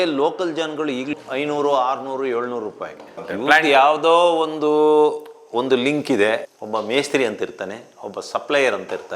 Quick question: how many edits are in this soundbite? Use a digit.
2